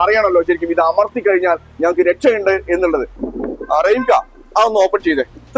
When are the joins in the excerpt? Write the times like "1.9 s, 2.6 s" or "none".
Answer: 3.1 s